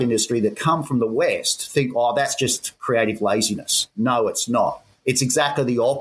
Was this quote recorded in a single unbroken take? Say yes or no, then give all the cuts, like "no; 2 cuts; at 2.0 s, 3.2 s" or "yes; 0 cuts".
no; 1 cut; at 4.9 s